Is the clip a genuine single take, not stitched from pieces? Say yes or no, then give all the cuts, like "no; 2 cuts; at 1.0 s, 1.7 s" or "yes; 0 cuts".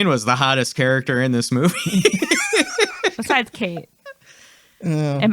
yes; 0 cuts